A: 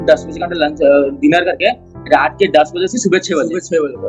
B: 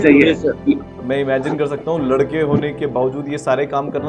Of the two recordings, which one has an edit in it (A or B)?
B